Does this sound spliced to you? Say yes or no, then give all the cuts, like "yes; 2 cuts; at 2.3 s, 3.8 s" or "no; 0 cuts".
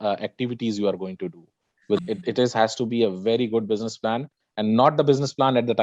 yes; 1 cut; at 2.0 s